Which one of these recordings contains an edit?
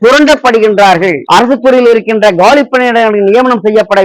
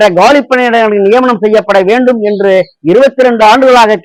first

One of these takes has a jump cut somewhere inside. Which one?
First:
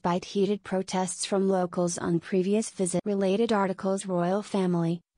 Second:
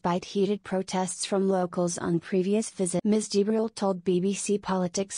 second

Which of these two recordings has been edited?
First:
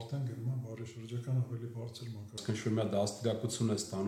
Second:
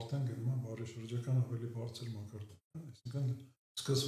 first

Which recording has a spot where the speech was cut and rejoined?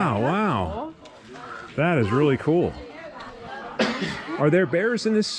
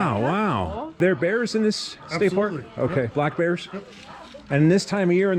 second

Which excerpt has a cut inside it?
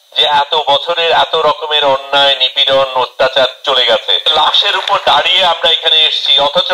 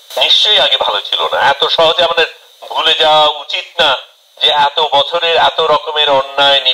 first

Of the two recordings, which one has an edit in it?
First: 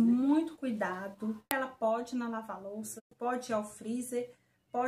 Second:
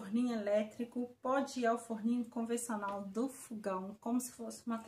first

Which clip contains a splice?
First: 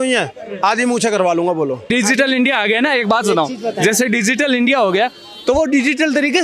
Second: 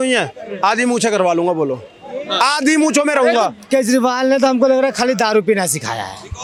first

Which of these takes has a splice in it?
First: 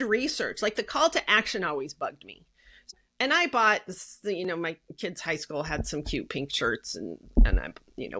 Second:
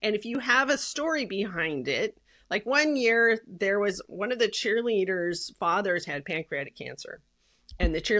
first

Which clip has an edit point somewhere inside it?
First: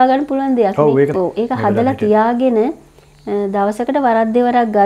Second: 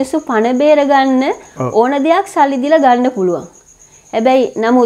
first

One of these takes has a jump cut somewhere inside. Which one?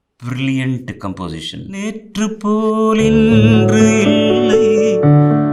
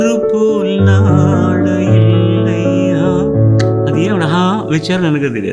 first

